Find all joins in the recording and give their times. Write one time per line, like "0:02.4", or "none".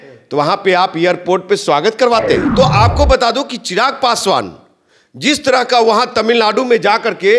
0:02.5